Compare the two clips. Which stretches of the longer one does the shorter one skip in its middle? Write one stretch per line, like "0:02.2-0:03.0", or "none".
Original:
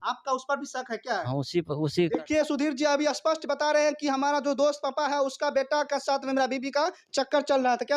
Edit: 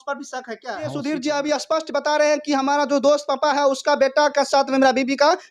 0:01.4-0:02.5